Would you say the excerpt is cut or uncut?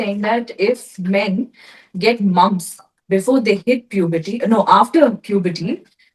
uncut